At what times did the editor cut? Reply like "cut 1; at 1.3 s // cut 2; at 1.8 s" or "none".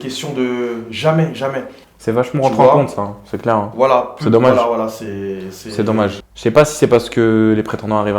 cut 1; at 1.9 s // cut 2; at 6.2 s

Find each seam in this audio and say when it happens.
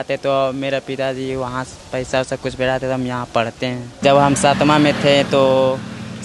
cut 1; at 4.0 s

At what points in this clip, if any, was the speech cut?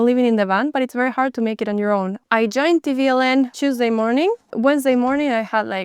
cut 1; at 2.2 s // cut 2; at 3.5 s

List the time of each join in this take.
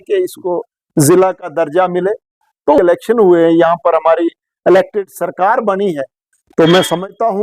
cut 1; at 2.8 s

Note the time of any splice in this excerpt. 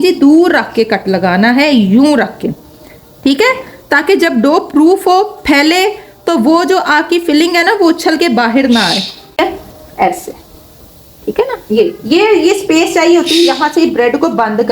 cut 1; at 9.4 s

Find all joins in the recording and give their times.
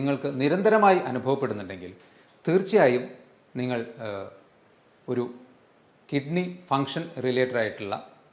none

